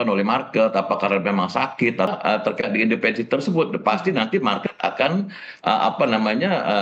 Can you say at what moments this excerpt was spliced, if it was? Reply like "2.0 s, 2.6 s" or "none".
2.1 s